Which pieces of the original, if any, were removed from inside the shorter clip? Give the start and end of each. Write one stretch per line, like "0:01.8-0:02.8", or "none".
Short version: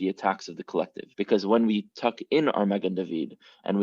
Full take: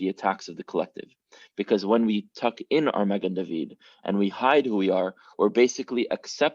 0:01.0-0:01.4